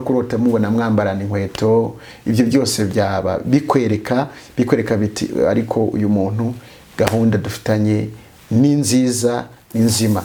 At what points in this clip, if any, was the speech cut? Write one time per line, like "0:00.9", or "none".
none